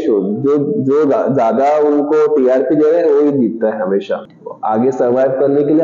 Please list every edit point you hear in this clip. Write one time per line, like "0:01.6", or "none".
0:04.3